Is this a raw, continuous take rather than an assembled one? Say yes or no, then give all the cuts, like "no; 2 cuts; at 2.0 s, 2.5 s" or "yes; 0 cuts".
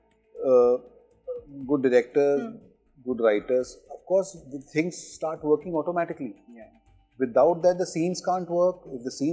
yes; 0 cuts